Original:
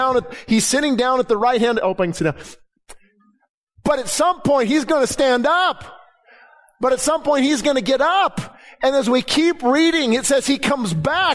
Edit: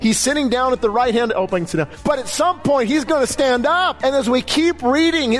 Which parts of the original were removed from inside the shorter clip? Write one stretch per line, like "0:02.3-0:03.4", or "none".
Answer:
0:02.4-0:03.7
0:05.7-0:08.7